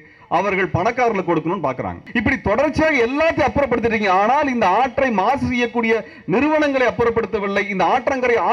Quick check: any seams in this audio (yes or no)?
yes